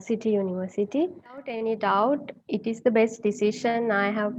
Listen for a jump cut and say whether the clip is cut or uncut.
cut